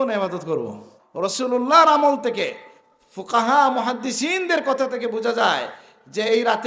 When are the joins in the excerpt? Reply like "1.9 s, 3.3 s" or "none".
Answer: 1.0 s